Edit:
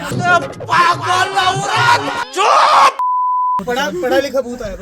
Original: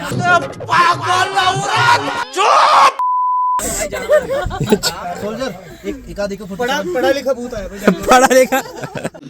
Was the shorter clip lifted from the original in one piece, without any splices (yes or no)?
no